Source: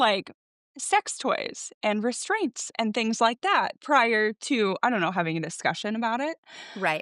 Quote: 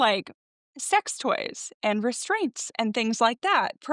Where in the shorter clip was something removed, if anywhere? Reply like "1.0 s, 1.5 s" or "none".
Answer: none